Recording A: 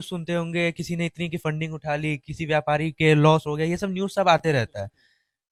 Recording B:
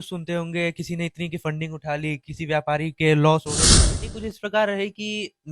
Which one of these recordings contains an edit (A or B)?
B